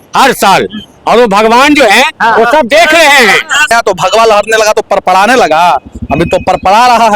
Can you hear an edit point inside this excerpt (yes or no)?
yes